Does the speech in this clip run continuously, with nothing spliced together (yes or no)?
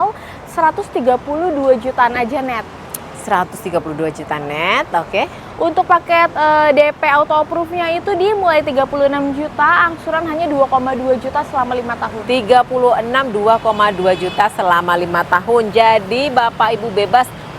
yes